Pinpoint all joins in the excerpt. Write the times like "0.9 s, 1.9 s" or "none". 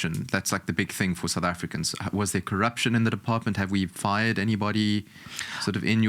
none